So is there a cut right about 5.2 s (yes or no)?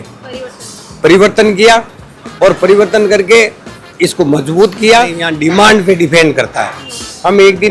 yes